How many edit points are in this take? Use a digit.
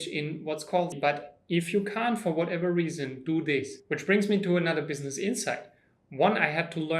2